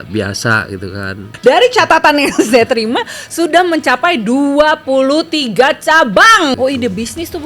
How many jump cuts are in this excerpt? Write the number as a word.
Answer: two